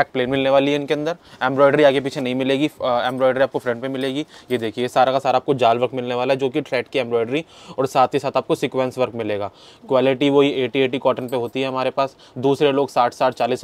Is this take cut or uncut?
uncut